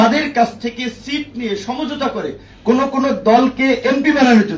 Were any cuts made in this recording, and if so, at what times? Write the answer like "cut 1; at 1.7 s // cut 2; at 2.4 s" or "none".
none

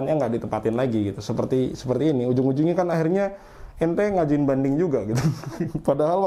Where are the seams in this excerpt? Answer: none

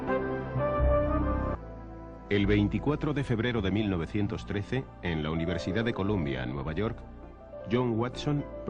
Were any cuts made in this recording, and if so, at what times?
none

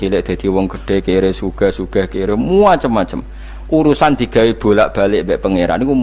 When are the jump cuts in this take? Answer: none

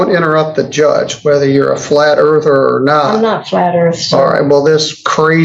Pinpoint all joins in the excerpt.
none

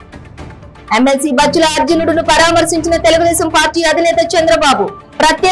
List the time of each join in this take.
none

